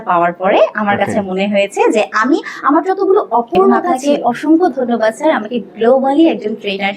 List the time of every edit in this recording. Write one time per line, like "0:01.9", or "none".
0:03.9